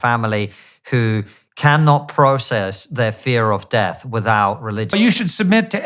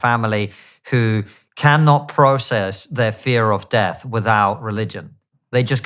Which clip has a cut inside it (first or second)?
first